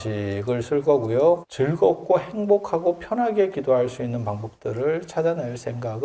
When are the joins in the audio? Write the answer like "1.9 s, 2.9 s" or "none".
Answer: 1.5 s